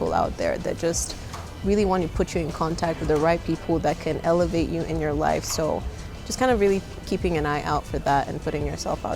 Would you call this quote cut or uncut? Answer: uncut